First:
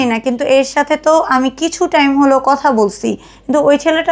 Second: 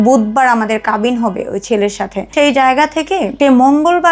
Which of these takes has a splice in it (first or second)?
second